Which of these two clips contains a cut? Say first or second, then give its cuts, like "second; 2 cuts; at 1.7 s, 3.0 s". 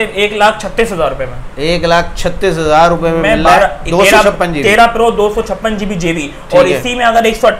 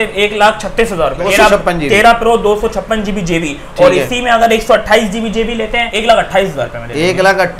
second; 2 cuts; at 1.2 s, 5.9 s